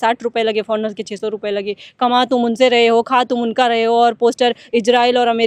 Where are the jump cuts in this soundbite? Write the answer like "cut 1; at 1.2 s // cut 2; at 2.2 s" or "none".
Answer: none